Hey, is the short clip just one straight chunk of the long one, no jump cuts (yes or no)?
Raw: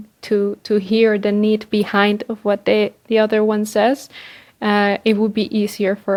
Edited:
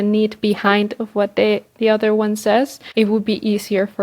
no